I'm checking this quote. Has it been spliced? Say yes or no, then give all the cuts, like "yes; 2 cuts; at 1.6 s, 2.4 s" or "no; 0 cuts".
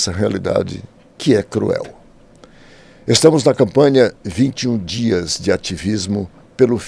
no; 0 cuts